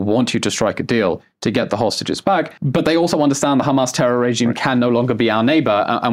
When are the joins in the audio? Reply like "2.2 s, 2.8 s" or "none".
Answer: 2.6 s